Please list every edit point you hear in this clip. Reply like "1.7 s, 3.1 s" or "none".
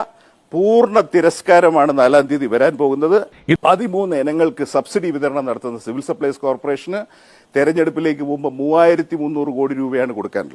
3.2 s